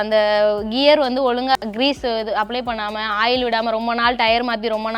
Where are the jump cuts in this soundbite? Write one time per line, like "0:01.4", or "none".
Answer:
0:01.6